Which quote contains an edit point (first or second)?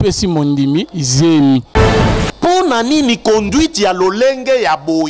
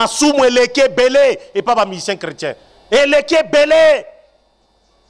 first